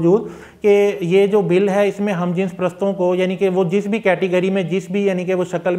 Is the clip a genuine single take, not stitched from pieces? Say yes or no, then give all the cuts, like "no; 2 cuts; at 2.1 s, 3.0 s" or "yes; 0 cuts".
yes; 0 cuts